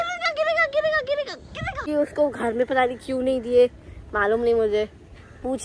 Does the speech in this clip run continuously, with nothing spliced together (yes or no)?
no